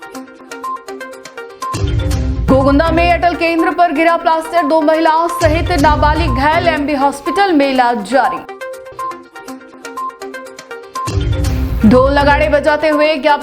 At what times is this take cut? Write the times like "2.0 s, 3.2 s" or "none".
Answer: 2.2 s

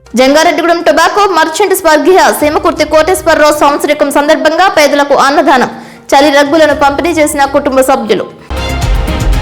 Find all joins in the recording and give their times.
8.4 s

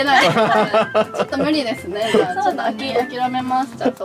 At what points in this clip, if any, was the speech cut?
none

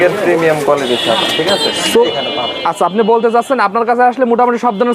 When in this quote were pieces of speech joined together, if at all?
2.0 s

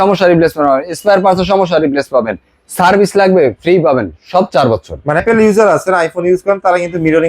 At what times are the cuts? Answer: 5.2 s

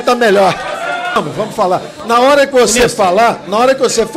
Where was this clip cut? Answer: 1.2 s

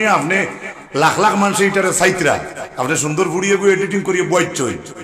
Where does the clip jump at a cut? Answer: none

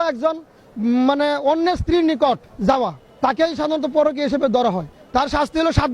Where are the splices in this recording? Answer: 2.7 s, 4.9 s

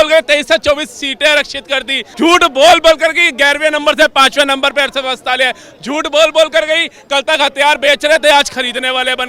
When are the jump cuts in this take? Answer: 2.0 s

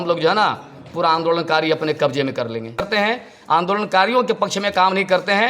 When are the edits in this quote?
2.9 s

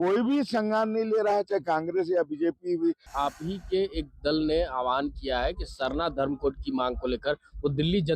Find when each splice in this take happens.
3.1 s

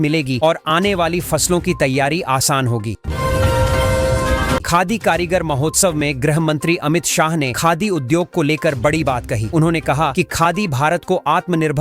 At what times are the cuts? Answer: 3.0 s, 4.6 s

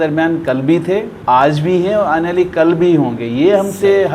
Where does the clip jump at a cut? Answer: 1.1 s

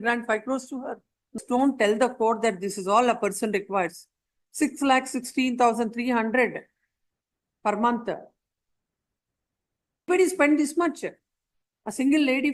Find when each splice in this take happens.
1.4 s, 10.1 s

